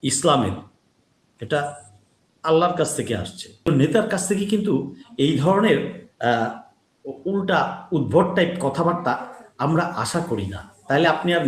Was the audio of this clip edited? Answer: yes; 1 cut; at 3.7 s

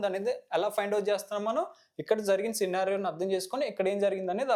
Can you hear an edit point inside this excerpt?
no; 0 cuts

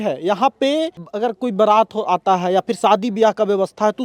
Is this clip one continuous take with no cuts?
no; 1 cut; at 1.1 s

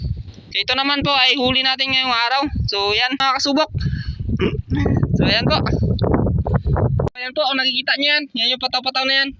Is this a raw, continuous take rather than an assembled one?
no; 2 cuts; at 3.2 s, 7.2 s

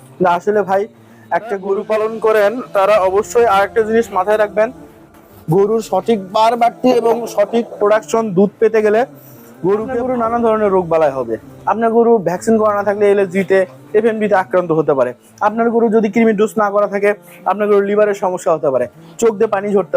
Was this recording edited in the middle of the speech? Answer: yes; 2 cuts; at 1.5 s, 10.0 s

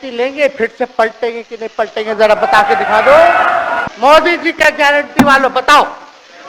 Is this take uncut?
no; 1 cut; at 3.8 s

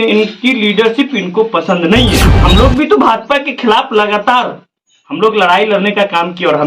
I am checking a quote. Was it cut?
yes; 1 cut; at 2.4 s

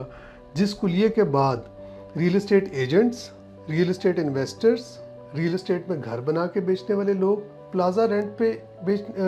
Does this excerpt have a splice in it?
no; 0 cuts

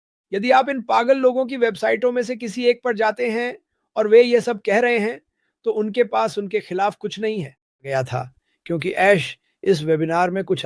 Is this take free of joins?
no; 1 cut; at 7.9 s

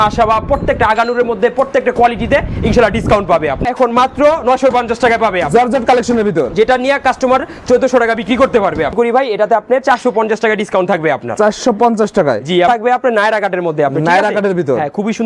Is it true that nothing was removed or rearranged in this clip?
no; 3 cuts; at 3.7 s, 8.9 s, 12.7 s

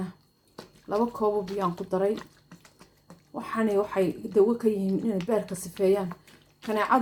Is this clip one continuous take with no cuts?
yes; 0 cuts

